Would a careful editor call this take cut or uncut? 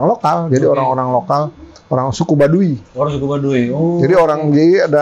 uncut